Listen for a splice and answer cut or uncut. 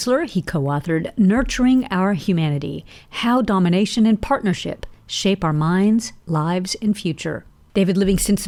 uncut